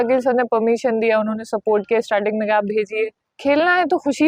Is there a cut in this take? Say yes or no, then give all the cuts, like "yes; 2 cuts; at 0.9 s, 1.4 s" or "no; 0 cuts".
yes; 1 cut; at 3.2 s